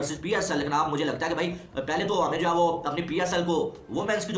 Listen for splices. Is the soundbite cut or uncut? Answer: uncut